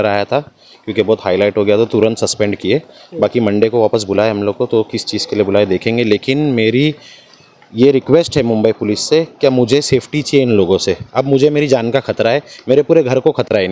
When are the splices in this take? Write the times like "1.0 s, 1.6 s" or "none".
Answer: none

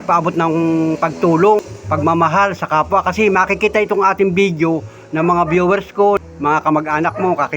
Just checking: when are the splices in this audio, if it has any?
1.6 s, 6.2 s

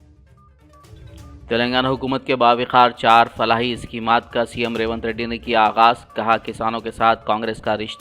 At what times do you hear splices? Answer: 1.1 s

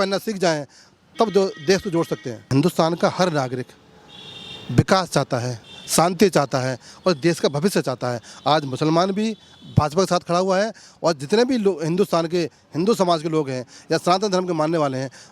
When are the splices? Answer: 2.5 s

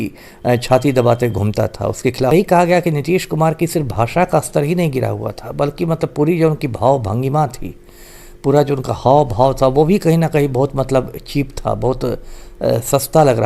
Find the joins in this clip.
2.3 s

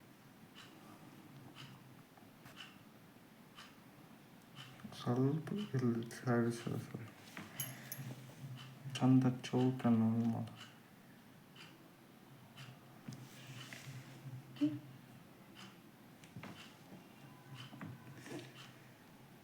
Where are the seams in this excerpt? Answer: 18.5 s

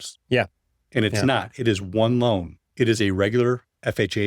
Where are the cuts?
2.6 s

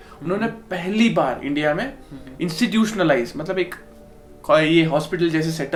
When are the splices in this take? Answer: none

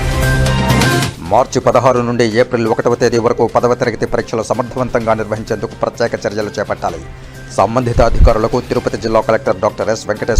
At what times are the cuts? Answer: 1.1 s

